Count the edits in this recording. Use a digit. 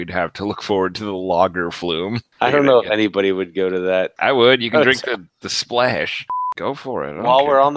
3